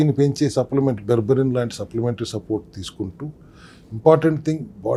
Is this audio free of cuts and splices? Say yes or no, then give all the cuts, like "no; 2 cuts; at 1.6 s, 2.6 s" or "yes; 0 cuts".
yes; 0 cuts